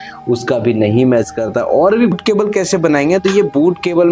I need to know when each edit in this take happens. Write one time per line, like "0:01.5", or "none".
0:02.1